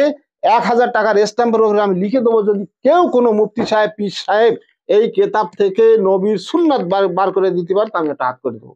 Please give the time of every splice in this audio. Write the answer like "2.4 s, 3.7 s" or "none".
none